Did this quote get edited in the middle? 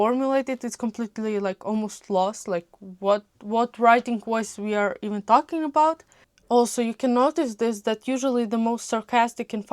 yes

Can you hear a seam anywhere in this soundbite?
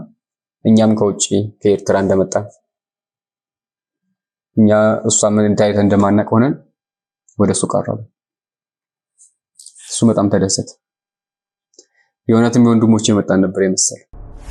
no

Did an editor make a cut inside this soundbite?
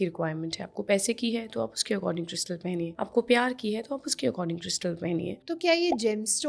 yes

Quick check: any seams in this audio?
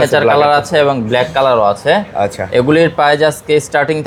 no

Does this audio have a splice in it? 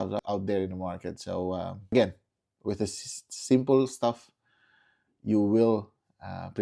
no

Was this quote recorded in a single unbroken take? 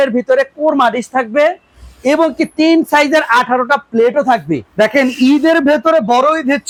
yes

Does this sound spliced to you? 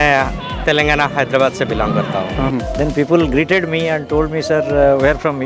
yes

